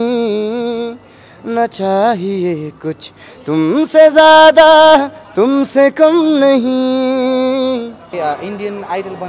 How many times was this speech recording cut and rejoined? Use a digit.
1